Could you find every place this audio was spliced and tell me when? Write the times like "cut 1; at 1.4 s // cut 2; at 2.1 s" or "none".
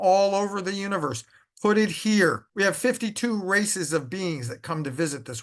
cut 1; at 2.4 s